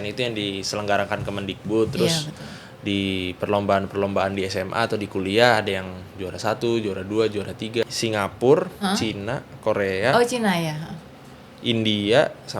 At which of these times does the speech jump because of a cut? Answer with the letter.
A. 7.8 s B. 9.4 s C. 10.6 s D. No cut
A